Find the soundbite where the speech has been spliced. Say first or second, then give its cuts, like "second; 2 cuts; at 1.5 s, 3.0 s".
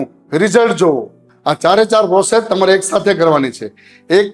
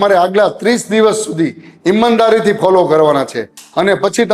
first; 1 cut; at 1.2 s